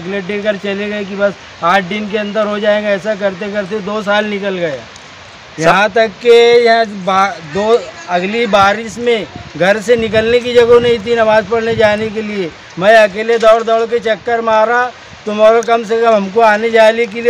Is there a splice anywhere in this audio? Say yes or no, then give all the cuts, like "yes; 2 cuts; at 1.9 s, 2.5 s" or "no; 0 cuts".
no; 0 cuts